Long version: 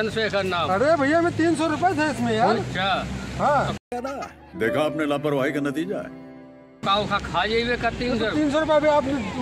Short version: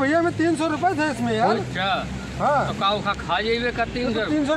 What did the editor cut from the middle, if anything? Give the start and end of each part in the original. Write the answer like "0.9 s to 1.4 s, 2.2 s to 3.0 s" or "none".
3.7 s to 6.8 s